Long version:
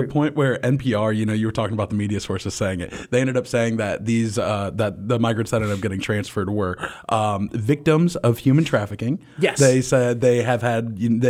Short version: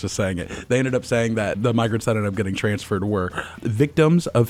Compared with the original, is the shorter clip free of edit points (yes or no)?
no